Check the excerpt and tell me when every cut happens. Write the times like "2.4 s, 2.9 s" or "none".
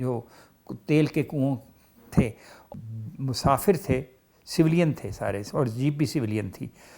2.6 s